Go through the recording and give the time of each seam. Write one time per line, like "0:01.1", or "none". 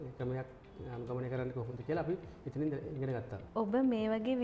none